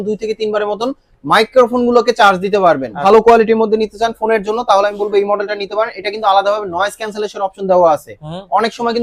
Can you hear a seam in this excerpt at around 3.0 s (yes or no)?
yes